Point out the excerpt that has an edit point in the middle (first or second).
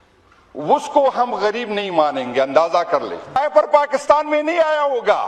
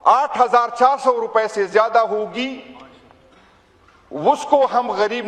first